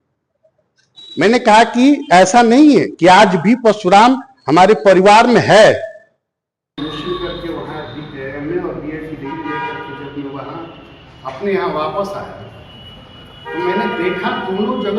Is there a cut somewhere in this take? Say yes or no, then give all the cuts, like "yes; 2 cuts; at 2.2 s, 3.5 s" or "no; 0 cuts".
yes; 1 cut; at 6.8 s